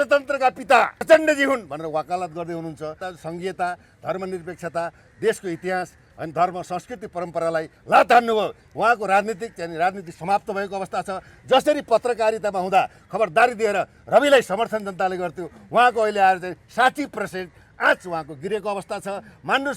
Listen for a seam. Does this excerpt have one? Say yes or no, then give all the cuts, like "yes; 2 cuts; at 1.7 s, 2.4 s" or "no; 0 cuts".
yes; 3 cuts; at 1.0 s, 3.0 s, 8.6 s